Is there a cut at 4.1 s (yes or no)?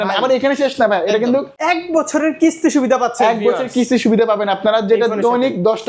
no